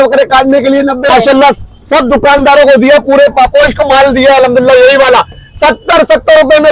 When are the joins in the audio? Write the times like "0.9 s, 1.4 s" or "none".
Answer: 1.1 s